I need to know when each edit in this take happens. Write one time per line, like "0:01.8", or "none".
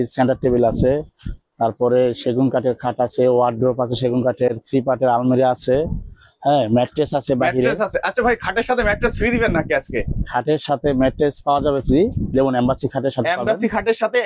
none